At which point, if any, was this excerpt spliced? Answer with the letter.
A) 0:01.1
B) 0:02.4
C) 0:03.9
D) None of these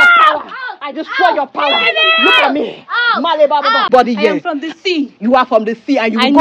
C